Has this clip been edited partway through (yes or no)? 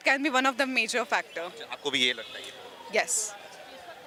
no